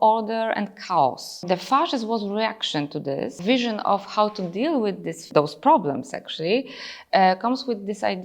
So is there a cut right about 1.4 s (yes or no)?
yes